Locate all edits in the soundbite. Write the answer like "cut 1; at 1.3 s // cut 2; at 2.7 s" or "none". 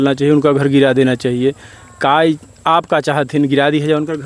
none

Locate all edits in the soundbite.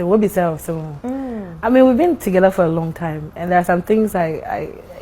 none

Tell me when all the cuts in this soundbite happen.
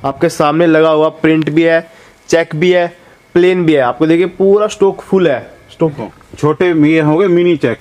cut 1; at 5.9 s

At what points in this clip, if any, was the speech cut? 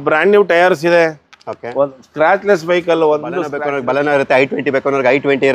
cut 1; at 3.5 s

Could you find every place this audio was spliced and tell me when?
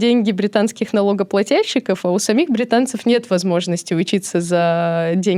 none

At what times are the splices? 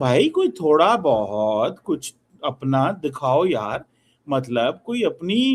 none

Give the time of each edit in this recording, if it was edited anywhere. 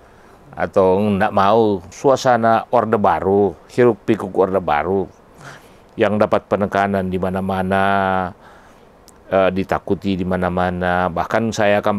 cut 1; at 1.9 s

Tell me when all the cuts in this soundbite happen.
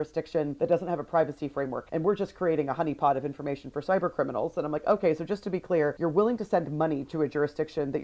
cut 1; at 7.1 s

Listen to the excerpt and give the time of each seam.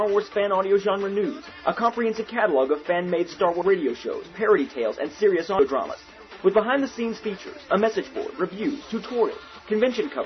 cut 1; at 3.6 s // cut 2; at 5.6 s

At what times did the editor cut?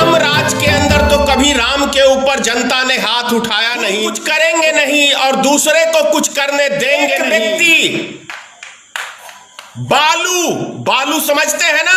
cut 1; at 4.2 s // cut 2; at 7.2 s

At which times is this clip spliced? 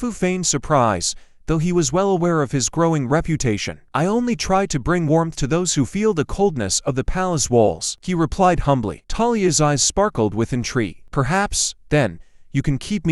none

